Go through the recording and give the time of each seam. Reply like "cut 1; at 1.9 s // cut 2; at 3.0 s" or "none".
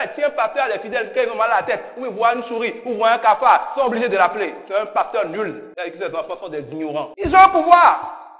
cut 1; at 7.1 s